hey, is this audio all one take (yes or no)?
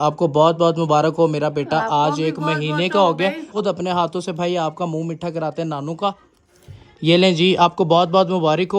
no